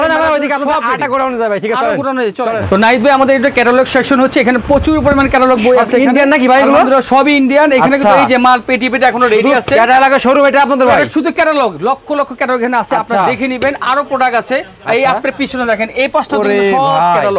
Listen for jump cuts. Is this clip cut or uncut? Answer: uncut